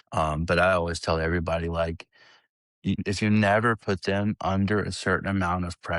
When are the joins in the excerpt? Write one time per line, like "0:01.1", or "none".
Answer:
0:03.0